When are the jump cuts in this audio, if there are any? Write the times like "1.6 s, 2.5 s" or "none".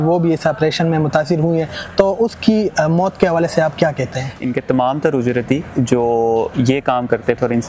4.4 s